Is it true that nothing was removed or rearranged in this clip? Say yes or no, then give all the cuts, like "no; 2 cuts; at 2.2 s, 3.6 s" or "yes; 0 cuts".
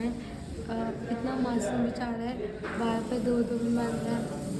yes; 0 cuts